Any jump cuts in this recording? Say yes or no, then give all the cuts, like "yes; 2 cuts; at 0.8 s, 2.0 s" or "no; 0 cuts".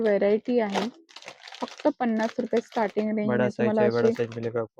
no; 0 cuts